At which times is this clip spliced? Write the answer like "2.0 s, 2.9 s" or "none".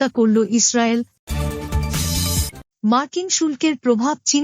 1.2 s, 2.6 s